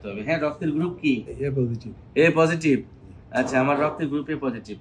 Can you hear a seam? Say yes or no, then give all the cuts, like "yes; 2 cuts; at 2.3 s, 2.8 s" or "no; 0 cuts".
yes; 1 cut; at 1.3 s